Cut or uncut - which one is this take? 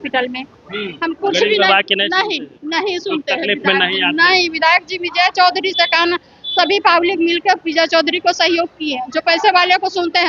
cut